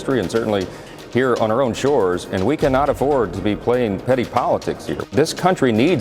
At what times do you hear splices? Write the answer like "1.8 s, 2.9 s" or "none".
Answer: 5.1 s